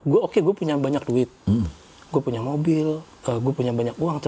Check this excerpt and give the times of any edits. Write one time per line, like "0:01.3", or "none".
0:03.1